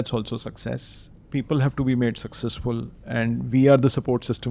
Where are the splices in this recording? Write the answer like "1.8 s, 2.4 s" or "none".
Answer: 1.1 s